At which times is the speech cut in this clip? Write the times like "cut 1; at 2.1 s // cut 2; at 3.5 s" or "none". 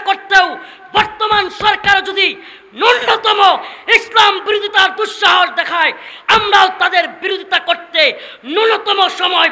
none